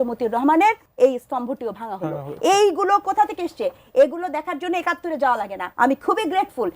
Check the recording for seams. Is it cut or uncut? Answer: cut